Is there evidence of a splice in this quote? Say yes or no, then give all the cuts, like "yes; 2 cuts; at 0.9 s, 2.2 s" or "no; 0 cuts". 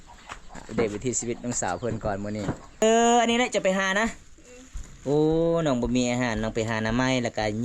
yes; 1 cut; at 2.8 s